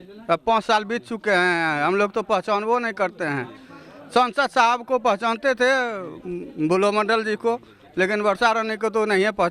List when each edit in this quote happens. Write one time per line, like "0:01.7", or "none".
none